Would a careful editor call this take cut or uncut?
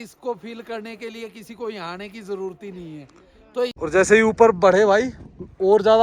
cut